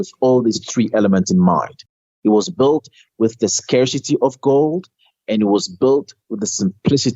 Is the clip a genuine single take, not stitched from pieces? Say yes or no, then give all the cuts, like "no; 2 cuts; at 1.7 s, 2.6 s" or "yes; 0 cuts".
yes; 0 cuts